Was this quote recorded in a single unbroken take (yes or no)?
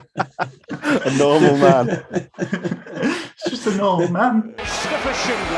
no